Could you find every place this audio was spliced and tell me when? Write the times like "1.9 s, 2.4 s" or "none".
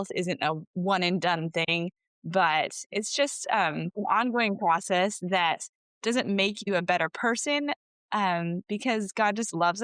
none